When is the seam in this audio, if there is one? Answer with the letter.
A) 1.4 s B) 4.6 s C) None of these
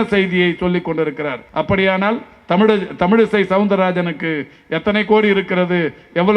A